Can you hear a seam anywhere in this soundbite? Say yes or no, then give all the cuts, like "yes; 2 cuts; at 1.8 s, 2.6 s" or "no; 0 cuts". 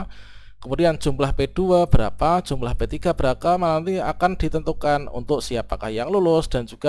no; 0 cuts